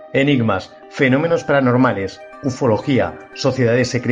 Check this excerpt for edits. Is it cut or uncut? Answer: uncut